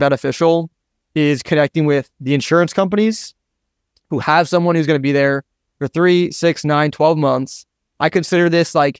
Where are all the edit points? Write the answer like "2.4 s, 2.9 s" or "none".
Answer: none